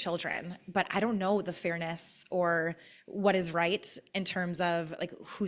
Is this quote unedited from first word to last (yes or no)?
yes